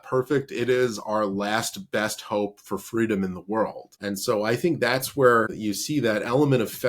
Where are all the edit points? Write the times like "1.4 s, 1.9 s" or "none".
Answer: 3.9 s, 5.6 s